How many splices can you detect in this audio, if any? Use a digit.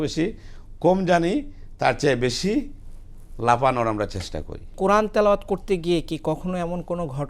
1